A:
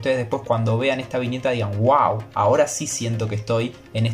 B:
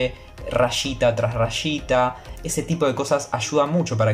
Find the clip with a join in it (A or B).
B